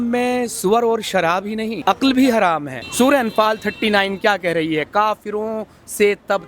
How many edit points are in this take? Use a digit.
2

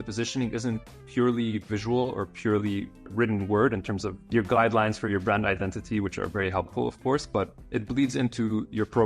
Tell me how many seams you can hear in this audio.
3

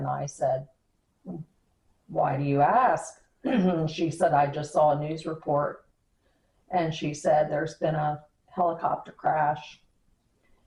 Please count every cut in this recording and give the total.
0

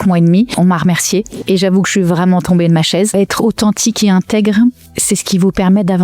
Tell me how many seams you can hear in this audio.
3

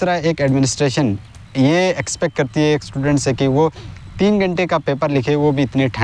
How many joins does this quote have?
0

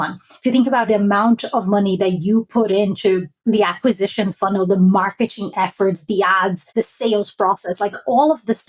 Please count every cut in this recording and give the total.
3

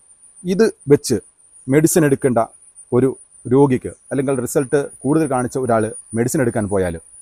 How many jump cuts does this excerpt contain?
0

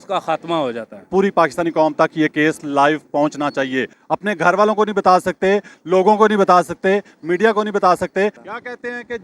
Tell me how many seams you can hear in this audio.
3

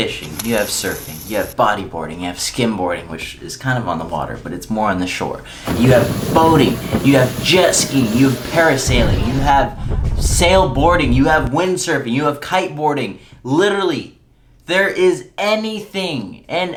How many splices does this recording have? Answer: 0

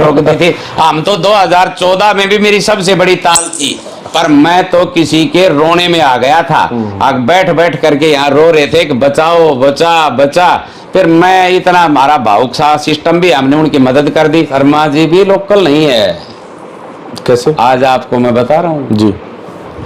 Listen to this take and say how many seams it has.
1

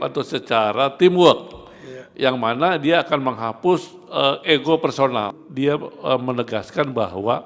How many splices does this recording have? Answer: 1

